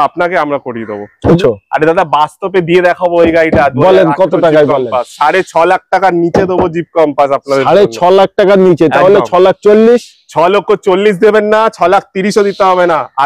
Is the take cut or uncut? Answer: cut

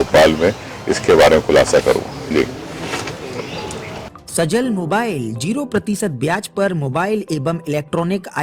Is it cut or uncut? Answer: cut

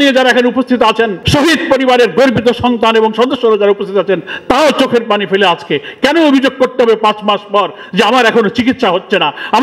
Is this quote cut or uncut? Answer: cut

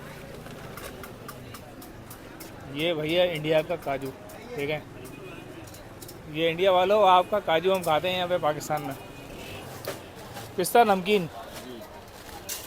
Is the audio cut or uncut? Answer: cut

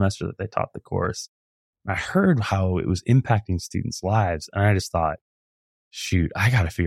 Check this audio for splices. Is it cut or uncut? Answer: uncut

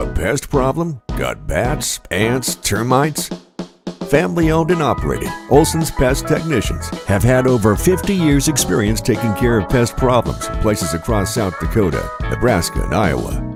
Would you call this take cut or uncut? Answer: uncut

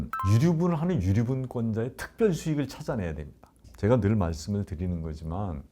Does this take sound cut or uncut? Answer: cut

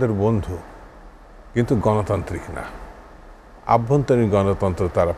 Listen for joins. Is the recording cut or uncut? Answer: uncut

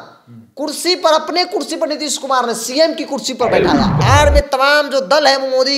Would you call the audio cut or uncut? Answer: cut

